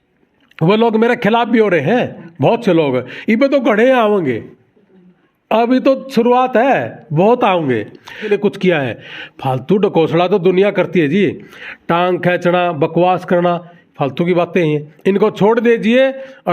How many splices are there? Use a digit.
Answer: 1